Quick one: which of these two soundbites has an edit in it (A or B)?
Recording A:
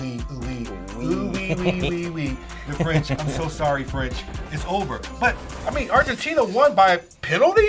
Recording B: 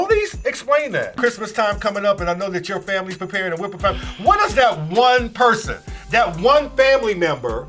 B